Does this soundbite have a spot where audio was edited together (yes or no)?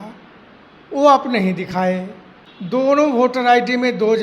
yes